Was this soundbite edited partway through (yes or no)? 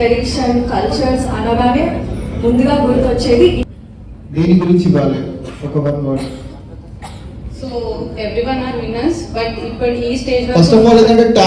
yes